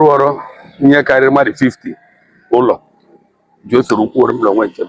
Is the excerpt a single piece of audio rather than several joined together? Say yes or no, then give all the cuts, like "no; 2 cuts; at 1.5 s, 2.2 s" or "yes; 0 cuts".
yes; 0 cuts